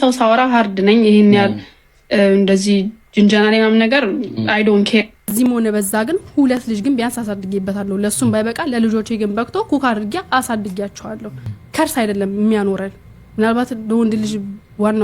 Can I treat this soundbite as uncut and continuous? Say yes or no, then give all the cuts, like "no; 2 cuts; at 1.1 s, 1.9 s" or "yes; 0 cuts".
no; 2 cuts; at 5.2 s, 11.5 s